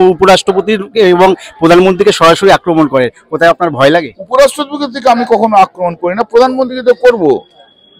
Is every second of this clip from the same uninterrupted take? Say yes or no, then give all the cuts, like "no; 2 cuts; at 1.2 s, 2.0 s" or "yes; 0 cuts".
yes; 0 cuts